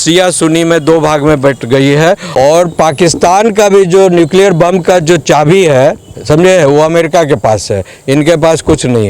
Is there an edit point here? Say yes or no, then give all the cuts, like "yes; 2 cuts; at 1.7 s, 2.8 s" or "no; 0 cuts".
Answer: yes; 1 cut; at 2.2 s